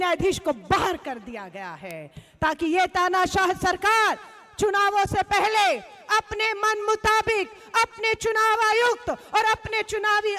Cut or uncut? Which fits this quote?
uncut